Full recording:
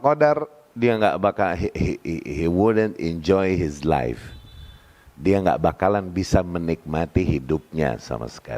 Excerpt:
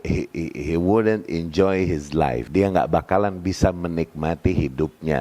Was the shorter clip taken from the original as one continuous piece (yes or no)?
no